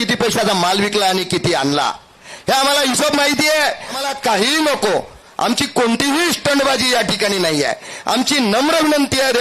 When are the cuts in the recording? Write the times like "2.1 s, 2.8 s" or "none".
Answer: 4.0 s